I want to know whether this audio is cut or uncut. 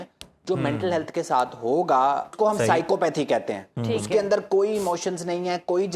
cut